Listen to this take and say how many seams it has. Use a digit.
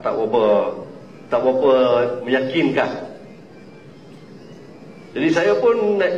1